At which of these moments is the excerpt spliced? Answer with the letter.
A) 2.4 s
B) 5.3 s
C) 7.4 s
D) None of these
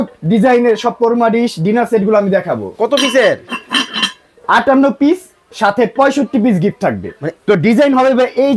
C